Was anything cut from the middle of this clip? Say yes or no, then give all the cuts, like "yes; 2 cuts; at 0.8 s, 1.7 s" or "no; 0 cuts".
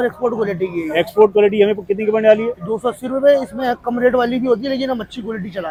no; 0 cuts